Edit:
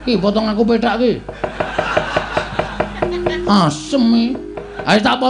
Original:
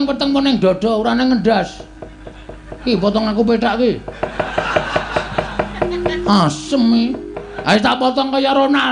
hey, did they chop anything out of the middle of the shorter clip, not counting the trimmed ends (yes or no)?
no